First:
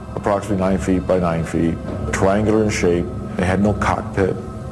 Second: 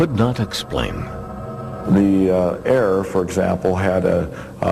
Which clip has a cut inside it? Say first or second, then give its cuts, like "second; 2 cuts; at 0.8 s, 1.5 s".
second; 1 cut; at 1.6 s